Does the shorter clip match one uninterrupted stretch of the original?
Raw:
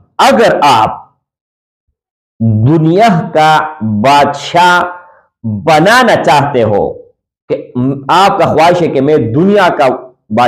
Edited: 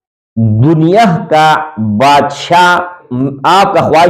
no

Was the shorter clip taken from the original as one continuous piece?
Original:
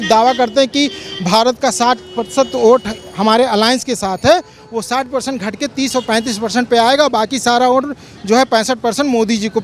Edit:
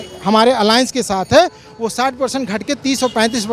yes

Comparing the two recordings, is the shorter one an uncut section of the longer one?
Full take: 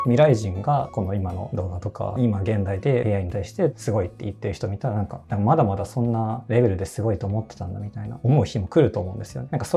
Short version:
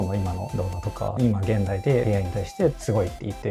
yes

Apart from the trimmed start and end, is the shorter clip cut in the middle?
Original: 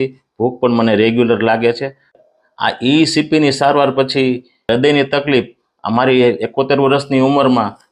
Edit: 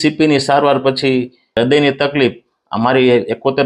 no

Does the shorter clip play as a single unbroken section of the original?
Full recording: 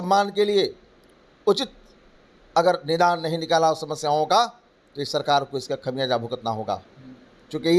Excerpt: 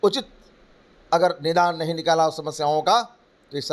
yes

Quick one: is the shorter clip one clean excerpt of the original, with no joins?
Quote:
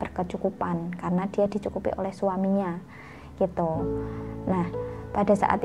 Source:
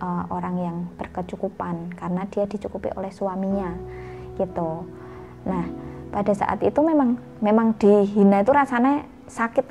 yes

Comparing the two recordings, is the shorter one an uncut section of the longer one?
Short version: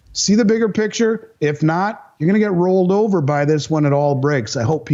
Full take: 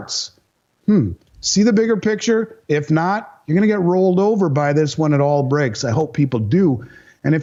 yes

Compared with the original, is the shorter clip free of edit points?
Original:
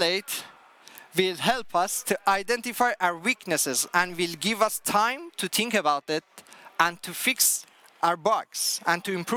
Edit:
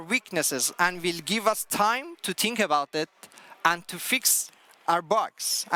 yes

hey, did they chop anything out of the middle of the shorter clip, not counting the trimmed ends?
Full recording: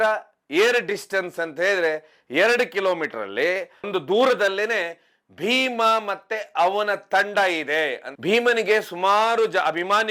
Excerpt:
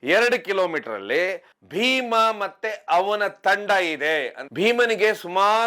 yes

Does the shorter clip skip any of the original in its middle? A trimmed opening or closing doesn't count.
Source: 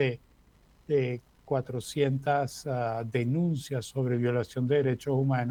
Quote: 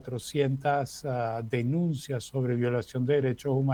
no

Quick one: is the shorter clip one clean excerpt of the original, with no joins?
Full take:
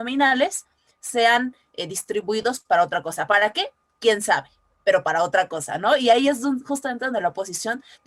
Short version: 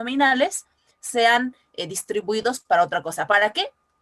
yes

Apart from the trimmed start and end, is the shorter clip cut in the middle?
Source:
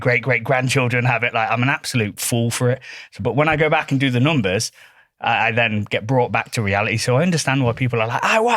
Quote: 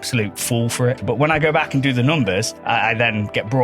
yes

